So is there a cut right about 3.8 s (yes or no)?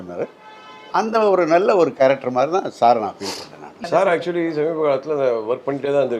yes